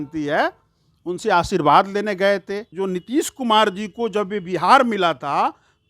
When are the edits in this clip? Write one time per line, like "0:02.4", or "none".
0:02.7